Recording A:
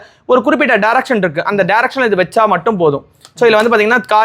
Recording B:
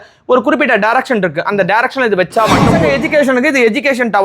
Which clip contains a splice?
B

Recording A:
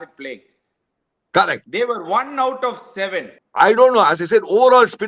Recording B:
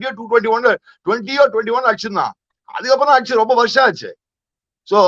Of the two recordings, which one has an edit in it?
A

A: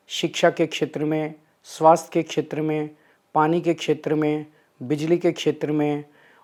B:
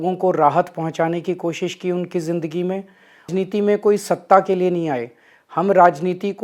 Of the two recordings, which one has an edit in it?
B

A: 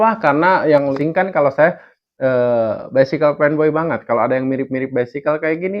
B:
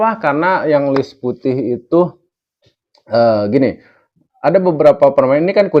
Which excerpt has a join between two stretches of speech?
A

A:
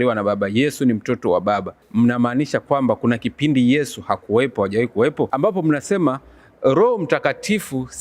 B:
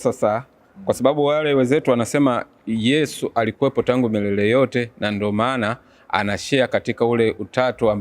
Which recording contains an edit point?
A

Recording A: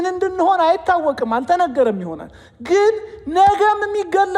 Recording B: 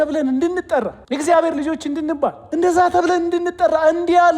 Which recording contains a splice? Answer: B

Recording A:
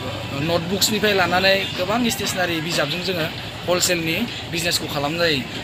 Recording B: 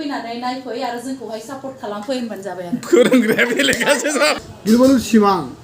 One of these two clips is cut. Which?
B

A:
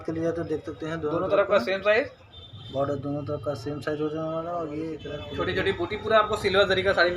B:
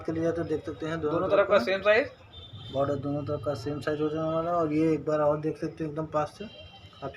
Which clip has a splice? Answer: A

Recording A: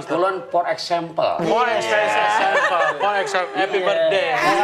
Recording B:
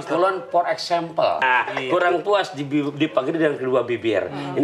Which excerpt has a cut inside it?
B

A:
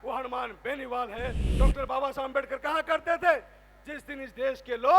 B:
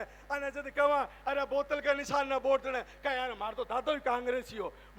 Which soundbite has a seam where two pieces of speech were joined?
A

